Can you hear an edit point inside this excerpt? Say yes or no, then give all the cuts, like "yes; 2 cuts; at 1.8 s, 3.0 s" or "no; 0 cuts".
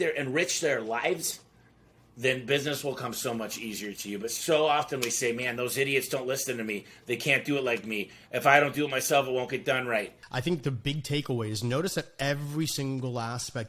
yes; 1 cut; at 10.2 s